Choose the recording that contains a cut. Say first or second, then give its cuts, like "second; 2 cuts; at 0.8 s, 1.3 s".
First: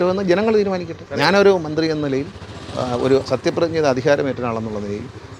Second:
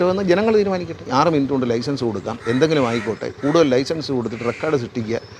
second; 1 cut; at 1.0 s